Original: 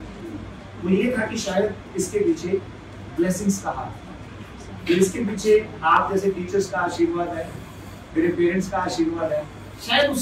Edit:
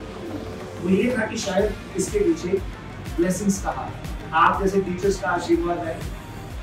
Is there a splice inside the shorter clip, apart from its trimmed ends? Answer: yes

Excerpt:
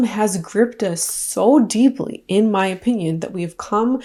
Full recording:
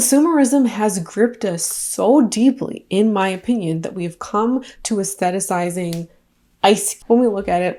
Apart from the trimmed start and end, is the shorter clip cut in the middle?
no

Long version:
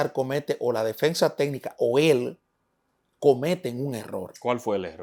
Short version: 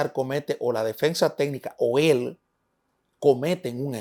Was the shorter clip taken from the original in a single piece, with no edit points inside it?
yes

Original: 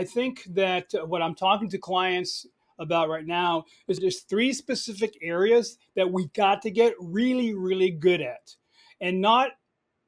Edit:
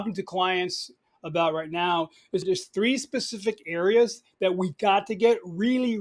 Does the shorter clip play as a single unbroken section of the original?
yes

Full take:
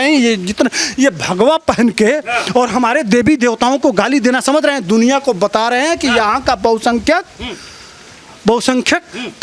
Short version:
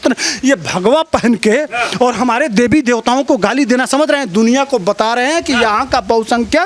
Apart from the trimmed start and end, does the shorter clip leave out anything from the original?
no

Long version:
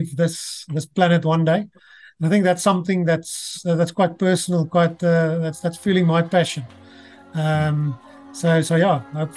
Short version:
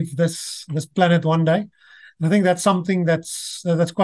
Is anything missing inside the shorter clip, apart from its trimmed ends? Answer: no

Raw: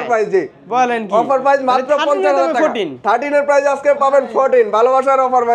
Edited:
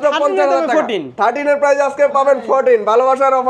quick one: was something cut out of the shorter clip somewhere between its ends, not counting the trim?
no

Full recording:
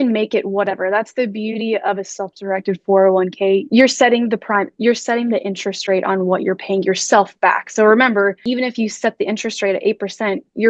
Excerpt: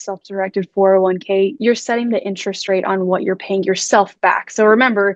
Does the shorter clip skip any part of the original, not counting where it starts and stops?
yes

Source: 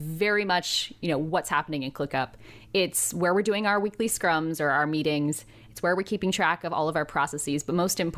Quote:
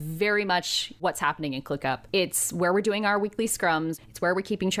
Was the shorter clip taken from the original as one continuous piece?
no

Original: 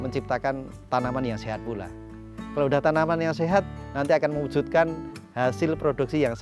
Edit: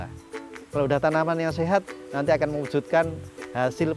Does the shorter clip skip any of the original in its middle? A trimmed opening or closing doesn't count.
no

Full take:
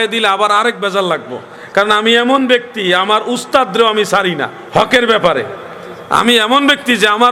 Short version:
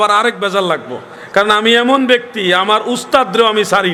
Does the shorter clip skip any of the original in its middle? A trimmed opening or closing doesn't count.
no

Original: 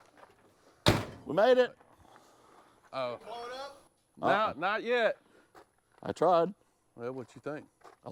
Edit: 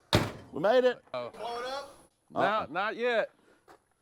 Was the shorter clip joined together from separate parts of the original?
yes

